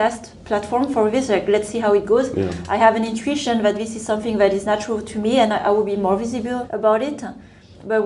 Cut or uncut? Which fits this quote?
cut